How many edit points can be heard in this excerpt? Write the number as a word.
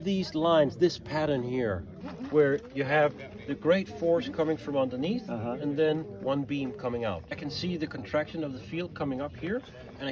two